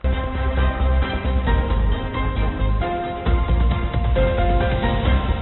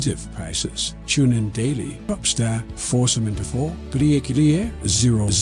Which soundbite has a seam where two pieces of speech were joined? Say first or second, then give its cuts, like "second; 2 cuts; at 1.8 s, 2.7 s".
second; 1 cut; at 2.0 s